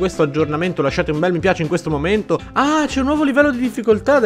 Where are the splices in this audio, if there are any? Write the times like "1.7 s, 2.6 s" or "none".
2.4 s